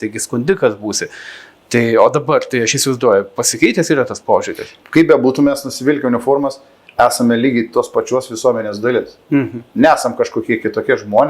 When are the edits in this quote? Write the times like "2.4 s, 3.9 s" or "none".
4.8 s